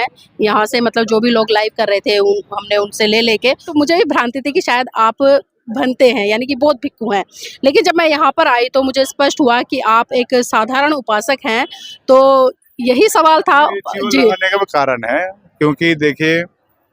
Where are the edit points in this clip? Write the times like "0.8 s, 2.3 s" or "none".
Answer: 3.7 s